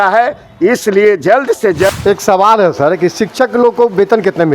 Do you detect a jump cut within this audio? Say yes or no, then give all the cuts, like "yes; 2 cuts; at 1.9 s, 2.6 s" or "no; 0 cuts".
yes; 1 cut; at 1.9 s